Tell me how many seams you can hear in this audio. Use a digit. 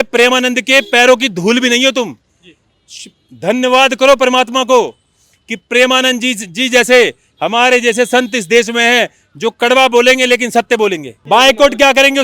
1